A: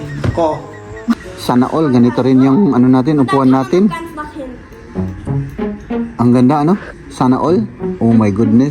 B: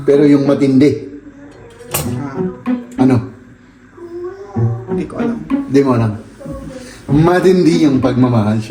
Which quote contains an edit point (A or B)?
A